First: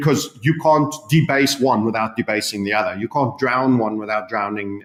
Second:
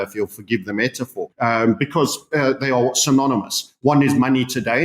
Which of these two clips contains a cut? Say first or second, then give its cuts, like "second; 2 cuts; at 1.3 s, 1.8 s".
second; 1 cut; at 1.3 s